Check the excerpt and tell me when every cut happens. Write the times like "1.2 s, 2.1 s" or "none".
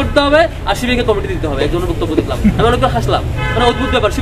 none

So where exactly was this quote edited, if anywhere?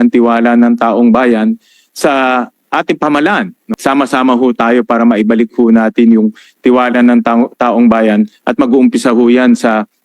3.6 s

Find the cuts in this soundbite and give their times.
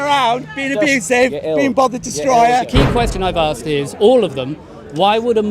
2.7 s

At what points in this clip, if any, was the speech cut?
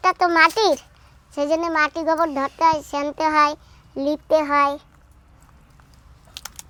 none

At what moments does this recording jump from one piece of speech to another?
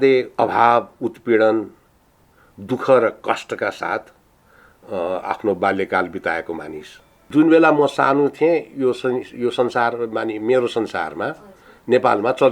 7.3 s

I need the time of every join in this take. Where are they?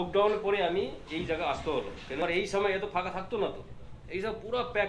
2.2 s

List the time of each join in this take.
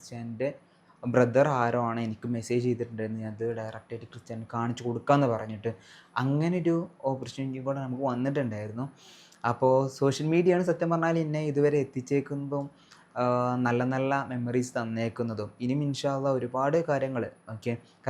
none

